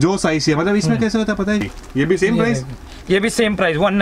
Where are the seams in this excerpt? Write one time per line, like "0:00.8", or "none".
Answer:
0:01.6